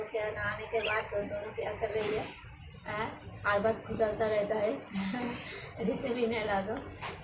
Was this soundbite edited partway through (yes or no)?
no